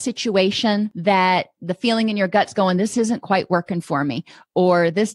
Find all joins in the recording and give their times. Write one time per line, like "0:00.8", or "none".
0:00.9